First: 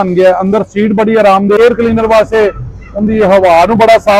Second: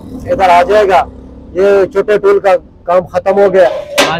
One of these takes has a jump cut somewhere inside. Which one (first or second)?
first